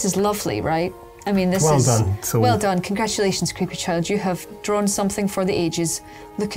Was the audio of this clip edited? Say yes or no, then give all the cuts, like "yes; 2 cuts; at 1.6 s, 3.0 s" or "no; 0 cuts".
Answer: no; 0 cuts